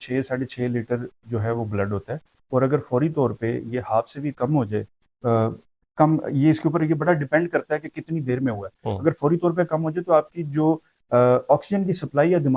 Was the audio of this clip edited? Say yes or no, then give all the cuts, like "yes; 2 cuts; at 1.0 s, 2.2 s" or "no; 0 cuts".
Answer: no; 0 cuts